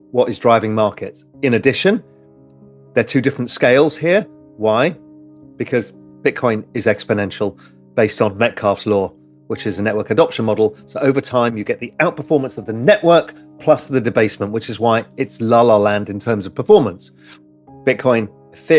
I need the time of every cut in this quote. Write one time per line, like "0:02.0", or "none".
0:06.0